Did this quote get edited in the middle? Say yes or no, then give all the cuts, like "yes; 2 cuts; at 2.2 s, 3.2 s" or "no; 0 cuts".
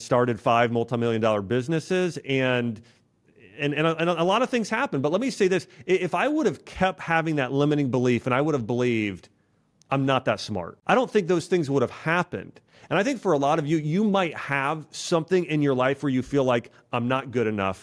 no; 0 cuts